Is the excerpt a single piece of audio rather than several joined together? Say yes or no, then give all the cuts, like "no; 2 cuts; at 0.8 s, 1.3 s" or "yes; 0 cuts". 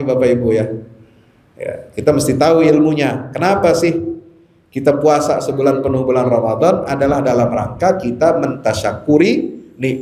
yes; 0 cuts